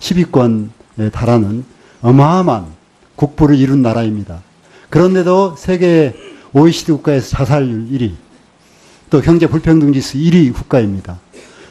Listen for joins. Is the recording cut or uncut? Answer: uncut